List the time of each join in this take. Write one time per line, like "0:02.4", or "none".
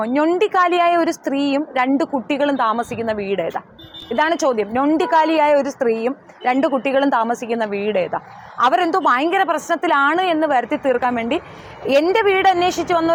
none